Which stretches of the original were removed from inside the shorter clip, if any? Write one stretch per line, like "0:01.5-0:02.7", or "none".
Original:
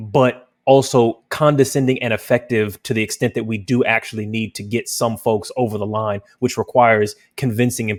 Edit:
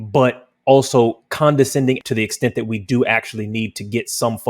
0:02.0-0:02.8